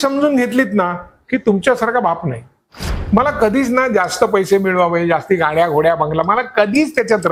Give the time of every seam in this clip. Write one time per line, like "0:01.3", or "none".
0:02.9